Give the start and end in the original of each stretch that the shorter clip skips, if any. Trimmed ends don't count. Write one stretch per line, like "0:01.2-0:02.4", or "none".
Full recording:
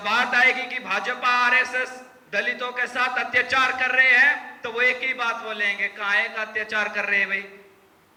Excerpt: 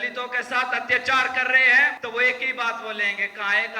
0:04.4-0:04.6